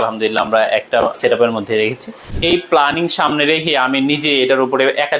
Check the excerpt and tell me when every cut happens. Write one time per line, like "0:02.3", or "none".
0:01.2
0:02.3

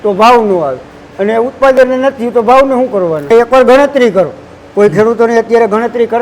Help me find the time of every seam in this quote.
0:03.3

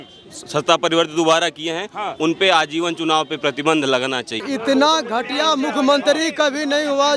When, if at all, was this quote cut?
0:04.4

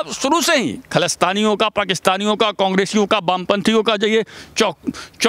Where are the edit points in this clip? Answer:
none

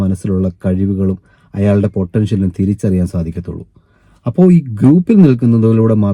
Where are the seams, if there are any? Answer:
none

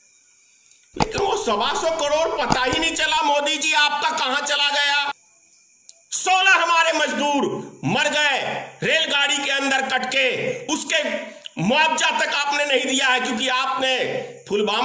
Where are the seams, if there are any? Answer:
0:05.1

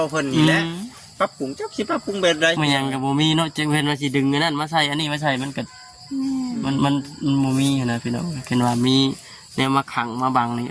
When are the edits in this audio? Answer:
none

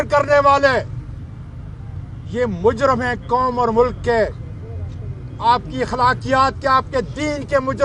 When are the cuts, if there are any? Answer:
none

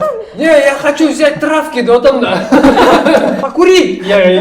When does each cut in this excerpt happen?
0:03.4

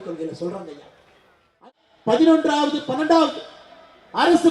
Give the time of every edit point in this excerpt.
0:01.6

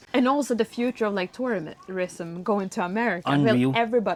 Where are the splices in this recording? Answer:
none

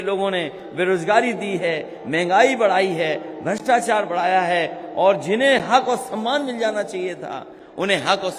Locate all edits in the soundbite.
none

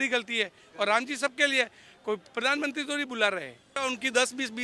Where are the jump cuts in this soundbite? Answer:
0:03.7

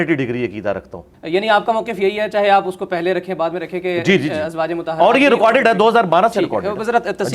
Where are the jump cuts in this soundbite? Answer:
0:01.1

